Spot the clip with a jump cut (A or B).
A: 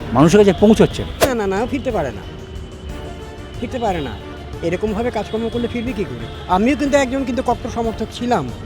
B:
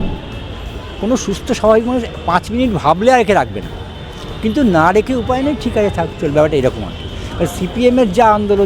A